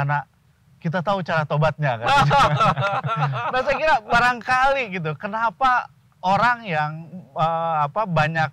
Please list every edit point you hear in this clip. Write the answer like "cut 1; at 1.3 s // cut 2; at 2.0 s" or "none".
none